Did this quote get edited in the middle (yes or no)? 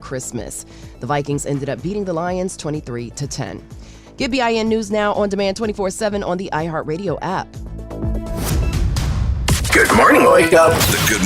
yes